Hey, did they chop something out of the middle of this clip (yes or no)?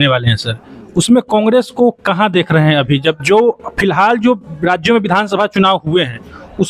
no